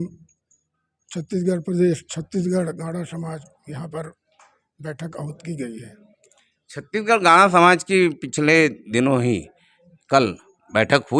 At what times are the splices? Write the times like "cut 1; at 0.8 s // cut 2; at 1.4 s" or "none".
none